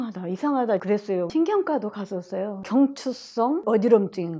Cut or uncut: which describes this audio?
cut